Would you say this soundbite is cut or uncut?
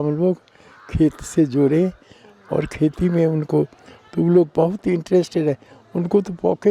uncut